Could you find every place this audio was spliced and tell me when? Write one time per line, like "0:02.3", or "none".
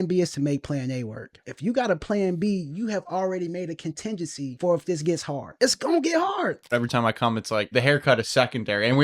0:01.4
0:04.5
0:05.4
0:06.7
0:07.7